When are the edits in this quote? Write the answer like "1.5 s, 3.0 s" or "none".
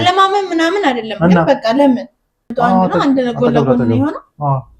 2.5 s